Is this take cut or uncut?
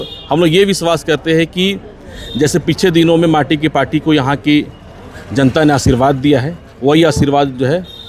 uncut